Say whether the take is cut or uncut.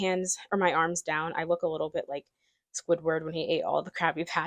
uncut